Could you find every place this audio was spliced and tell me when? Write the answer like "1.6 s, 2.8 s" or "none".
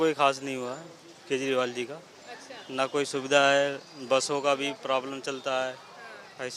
none